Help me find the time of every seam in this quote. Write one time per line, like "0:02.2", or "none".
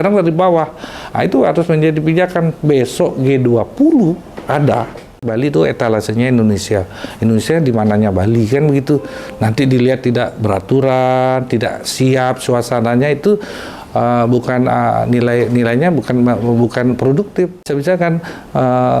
0:05.3
0:17.7